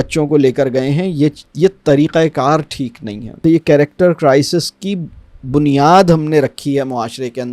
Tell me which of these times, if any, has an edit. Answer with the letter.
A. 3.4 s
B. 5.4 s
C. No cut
A